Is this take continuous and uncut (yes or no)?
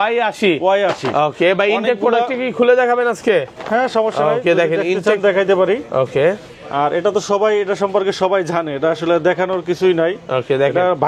yes